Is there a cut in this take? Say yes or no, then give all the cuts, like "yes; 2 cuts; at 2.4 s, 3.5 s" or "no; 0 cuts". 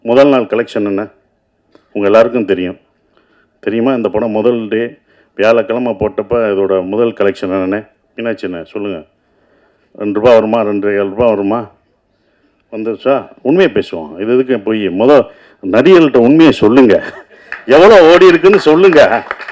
no; 0 cuts